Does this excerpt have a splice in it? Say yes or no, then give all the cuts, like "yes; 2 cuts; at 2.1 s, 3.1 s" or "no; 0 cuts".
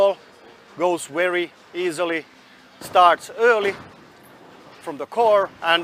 no; 0 cuts